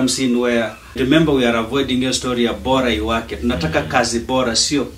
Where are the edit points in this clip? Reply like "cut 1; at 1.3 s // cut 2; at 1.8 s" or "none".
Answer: cut 1; at 1.0 s